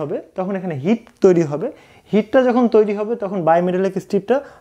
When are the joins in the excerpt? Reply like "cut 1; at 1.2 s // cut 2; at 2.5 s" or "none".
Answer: none